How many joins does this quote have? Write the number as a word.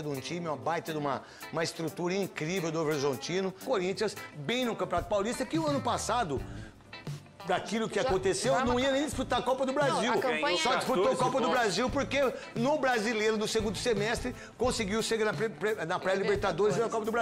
one